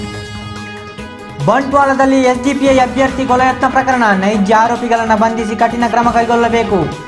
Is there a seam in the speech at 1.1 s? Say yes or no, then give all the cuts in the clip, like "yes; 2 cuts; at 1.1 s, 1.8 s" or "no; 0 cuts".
yes; 1 cut; at 1.1 s